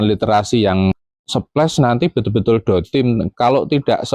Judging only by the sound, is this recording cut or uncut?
cut